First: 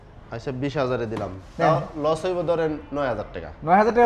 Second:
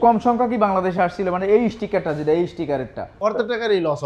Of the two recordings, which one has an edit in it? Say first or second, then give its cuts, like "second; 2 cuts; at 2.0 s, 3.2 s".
second; 1 cut; at 3.0 s